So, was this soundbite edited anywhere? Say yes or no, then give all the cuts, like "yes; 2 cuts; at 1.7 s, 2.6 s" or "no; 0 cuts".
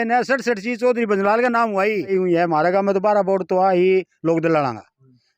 yes; 1 cut; at 2.1 s